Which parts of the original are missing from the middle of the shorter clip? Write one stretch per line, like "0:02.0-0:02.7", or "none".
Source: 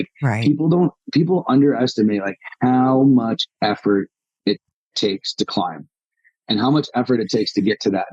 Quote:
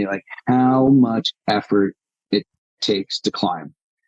none